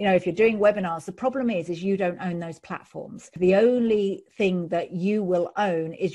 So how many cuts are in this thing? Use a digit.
1